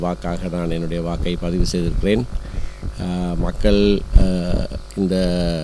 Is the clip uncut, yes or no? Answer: yes